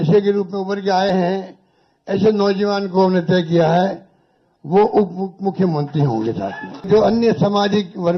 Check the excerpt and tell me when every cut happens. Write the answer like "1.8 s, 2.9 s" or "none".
6.9 s